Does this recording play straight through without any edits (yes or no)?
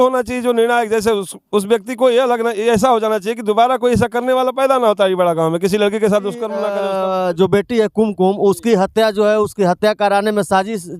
no